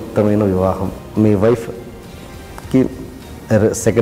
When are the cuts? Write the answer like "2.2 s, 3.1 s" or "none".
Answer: 0.9 s